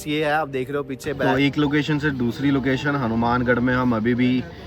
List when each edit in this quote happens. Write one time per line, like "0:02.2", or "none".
0:01.2